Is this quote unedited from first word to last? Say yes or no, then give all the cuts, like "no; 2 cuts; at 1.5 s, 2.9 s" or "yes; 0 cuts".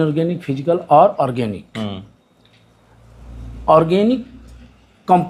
yes; 0 cuts